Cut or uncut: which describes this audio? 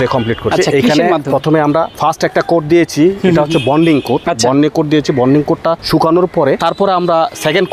cut